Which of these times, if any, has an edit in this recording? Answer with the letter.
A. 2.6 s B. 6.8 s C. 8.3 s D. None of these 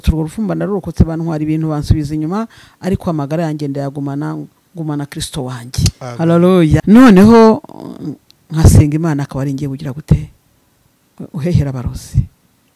B